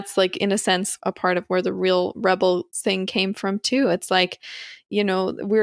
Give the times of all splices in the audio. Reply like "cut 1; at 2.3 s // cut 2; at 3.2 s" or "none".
cut 1; at 0.9 s